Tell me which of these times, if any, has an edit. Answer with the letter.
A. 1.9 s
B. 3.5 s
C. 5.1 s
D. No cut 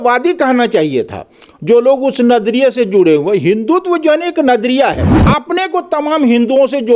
C